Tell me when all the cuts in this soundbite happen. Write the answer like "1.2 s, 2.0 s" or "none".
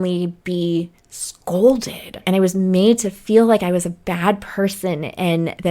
2.1 s

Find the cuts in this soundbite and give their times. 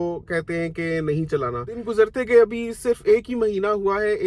1.8 s

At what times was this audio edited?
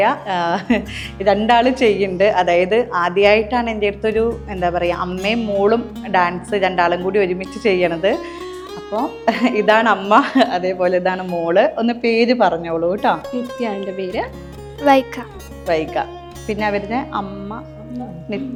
none

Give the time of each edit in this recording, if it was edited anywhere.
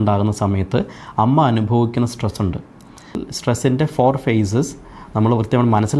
3.2 s

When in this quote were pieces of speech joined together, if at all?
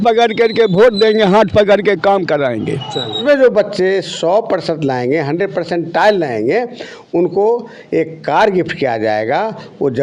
3.2 s

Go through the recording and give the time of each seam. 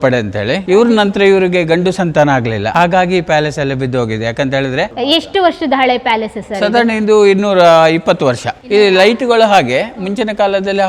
4.9 s, 8.5 s

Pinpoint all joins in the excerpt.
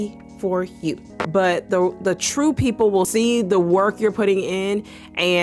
1.1 s, 3.1 s

